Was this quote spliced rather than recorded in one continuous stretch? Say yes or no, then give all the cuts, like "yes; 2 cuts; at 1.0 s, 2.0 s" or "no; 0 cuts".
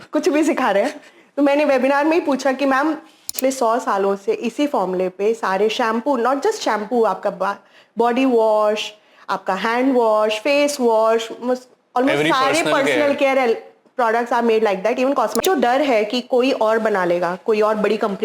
yes; 2 cuts; at 3.3 s, 15.4 s